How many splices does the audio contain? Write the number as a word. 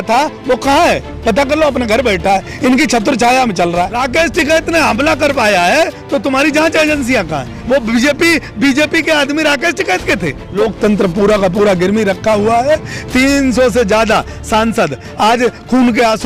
two